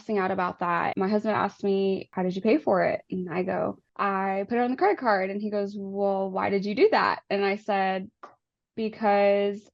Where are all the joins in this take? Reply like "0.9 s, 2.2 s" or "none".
0.9 s, 2.1 s, 3.9 s